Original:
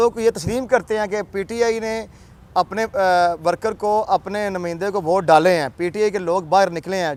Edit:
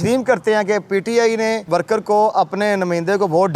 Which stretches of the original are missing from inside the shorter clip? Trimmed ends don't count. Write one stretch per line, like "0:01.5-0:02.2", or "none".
0:02.1-0:03.4

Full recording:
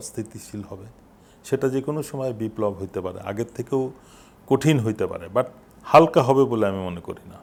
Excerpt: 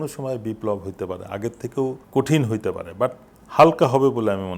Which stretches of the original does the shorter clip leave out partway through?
0:04.0-0:04.4

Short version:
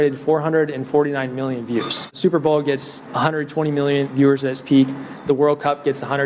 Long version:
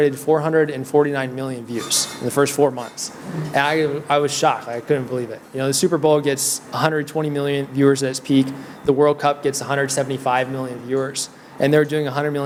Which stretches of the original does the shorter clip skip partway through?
0:02.2-0:05.8

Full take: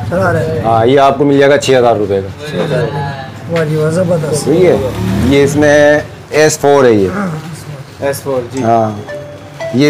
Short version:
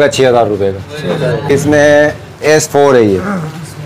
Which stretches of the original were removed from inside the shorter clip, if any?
0:03.0-0:05.4

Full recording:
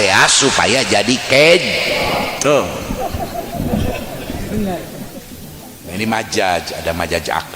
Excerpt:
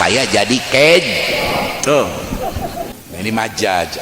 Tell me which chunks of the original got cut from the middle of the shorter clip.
0:03.5-0:05.6

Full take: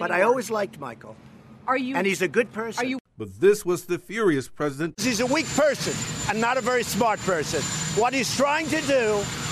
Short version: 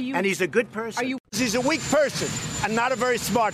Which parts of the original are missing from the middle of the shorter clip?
0:03.1-0:04.9

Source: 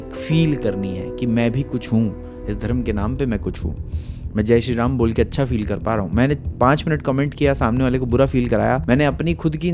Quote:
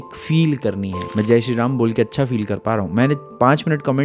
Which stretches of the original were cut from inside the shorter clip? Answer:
0:00.9-0:04.1

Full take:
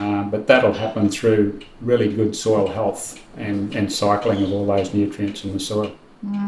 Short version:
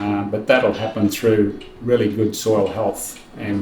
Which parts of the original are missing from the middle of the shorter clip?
none

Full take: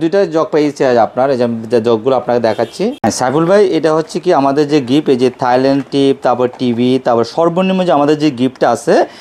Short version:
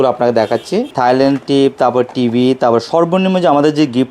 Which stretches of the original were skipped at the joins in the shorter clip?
0:03.0-0:05.3

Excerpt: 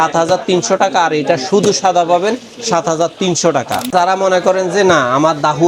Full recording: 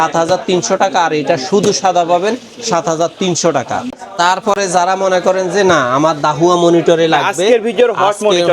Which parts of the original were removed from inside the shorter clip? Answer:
0:03.9-0:04.7

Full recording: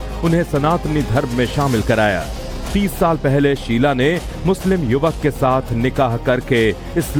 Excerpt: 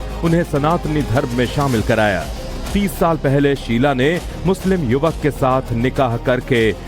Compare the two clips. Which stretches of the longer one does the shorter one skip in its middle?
none

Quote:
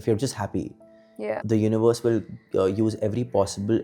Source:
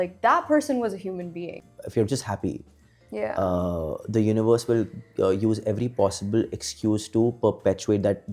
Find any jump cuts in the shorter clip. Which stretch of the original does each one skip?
0:03.2-0:03.9

